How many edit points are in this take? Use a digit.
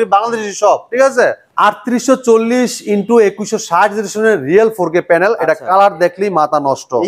1